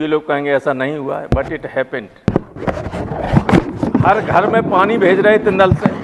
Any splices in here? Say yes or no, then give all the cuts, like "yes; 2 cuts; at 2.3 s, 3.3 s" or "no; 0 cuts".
no; 0 cuts